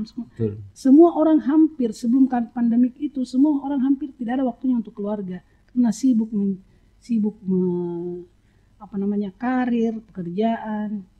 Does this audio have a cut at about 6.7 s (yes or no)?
no